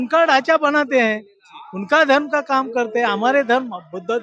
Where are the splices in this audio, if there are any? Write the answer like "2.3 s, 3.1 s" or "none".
none